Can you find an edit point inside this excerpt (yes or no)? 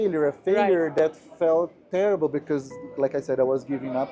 no